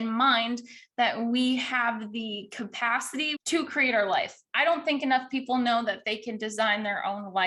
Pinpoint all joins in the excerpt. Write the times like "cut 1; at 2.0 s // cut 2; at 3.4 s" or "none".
cut 1; at 3.3 s